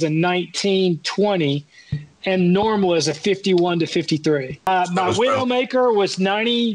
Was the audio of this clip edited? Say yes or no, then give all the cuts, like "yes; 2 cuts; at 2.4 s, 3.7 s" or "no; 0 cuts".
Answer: yes; 1 cut; at 4.7 s